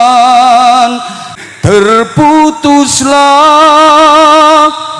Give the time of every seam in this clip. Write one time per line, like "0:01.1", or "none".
0:01.4